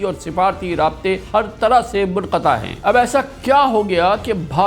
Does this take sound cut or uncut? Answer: cut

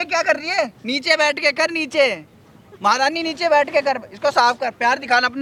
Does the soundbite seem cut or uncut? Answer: uncut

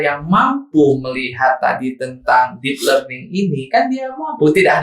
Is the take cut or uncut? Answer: uncut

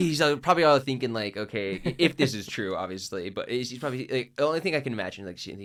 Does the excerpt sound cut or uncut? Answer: uncut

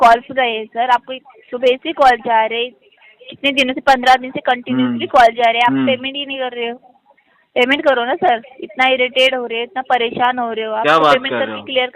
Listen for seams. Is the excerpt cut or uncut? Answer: uncut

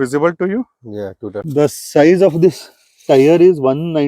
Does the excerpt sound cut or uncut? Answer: cut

